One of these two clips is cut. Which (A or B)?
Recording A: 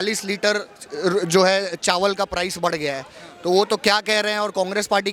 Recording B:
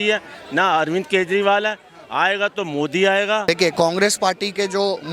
B